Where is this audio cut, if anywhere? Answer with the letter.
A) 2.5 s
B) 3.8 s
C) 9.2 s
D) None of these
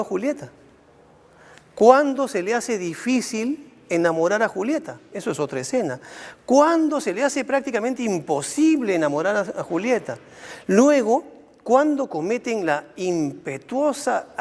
A